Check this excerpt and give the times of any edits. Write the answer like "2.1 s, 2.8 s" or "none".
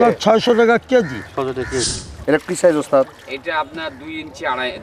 2.0 s